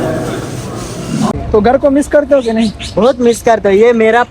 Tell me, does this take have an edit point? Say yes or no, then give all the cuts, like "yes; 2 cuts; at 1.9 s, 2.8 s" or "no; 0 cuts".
yes; 1 cut; at 1.3 s